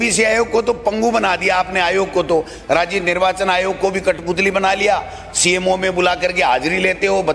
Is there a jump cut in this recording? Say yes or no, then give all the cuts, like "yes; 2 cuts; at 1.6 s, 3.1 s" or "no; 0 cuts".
no; 0 cuts